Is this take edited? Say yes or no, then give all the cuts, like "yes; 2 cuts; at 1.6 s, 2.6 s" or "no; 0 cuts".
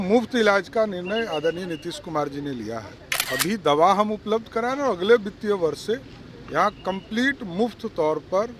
yes; 1 cut; at 3.1 s